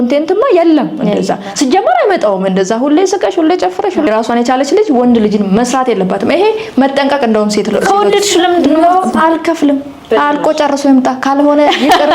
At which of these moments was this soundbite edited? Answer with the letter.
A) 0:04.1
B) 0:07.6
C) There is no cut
A